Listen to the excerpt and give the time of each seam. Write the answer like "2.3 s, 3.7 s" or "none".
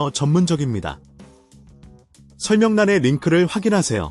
1.0 s, 2.5 s

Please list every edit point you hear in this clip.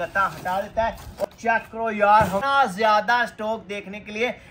1.2 s, 2.4 s

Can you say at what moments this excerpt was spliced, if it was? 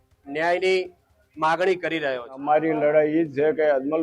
2.4 s

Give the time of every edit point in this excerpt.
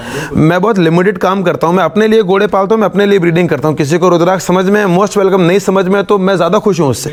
none

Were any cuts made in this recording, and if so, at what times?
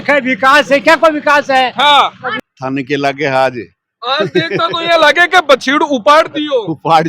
2.4 s

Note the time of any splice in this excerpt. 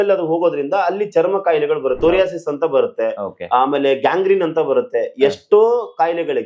2.0 s

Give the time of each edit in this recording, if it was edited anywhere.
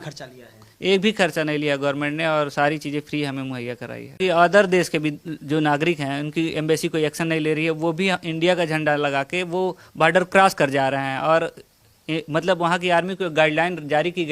4.2 s

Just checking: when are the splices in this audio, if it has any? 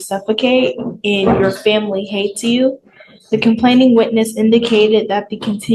none

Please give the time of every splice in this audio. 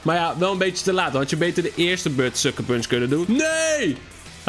3.2 s

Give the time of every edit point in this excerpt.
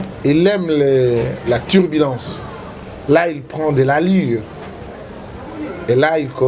none

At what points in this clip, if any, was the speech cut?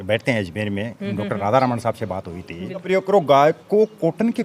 2.8 s

